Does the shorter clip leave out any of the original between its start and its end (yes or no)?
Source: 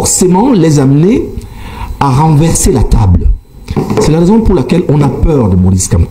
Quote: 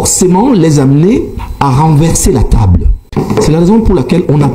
yes